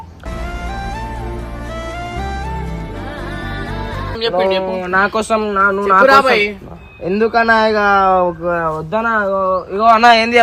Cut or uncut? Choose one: cut